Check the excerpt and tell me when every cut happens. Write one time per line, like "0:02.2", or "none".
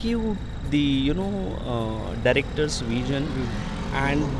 none